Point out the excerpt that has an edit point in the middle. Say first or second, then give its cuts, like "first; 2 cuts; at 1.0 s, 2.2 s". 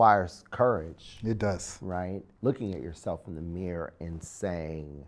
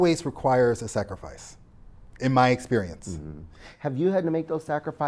first; 1 cut; at 2.3 s